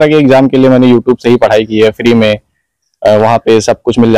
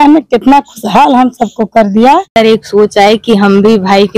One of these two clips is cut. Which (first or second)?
second